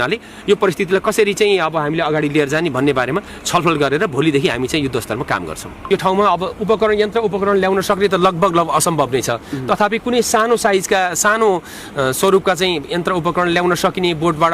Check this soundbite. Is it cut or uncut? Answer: cut